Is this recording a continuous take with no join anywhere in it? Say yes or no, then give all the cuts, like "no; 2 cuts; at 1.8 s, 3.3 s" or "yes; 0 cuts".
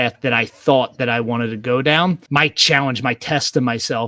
no; 1 cut; at 2.2 s